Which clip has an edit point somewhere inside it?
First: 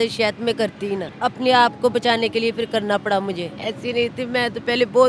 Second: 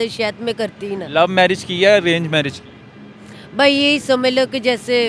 first; 2 cuts; at 1.1 s, 3.5 s

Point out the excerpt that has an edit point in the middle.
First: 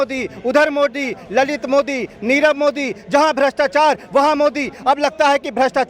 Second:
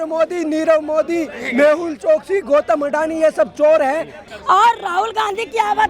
second; 1 cut; at 4.2 s

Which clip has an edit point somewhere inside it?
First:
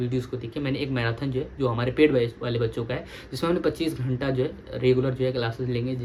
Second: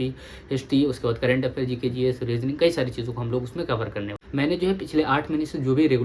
second; 1 cut; at 4.2 s

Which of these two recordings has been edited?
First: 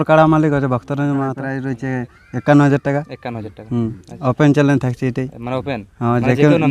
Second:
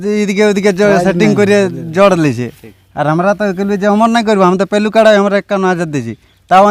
first; 1 cut; at 1.5 s

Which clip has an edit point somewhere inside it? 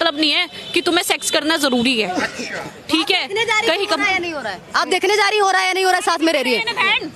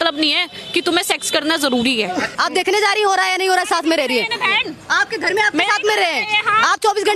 second; 1 cut; at 2.3 s

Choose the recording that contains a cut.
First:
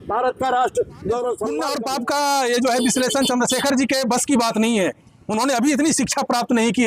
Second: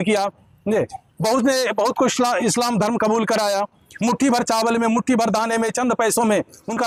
first; 1 cut; at 1.6 s

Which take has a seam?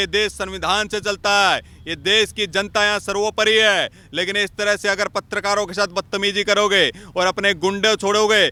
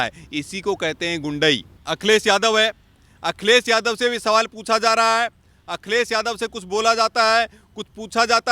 second; 1 cut; at 1.7 s

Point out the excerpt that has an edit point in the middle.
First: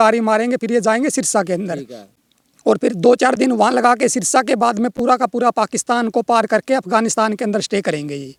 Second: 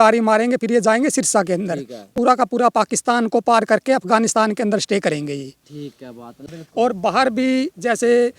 second; 2 cuts; at 2.1 s, 6.3 s

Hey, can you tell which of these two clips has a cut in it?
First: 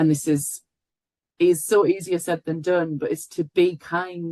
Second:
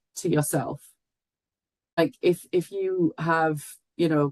second; 1 cut; at 2.0 s

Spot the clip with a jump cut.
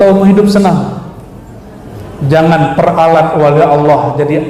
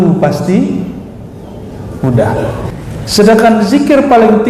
second; 1 cut; at 2.7 s

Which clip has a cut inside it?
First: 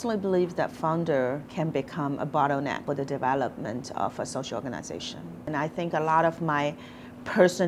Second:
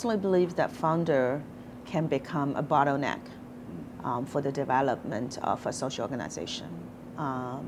first; 3 cuts; at 1.5 s, 2.8 s, 5.5 s

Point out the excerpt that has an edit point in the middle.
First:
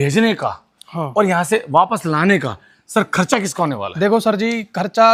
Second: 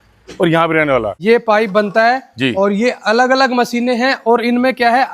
second; 1 cut; at 1.1 s

